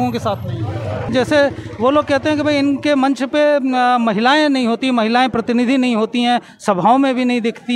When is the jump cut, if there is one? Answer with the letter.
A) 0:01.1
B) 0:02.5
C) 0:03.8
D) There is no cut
A